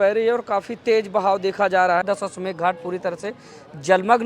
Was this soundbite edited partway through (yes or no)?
yes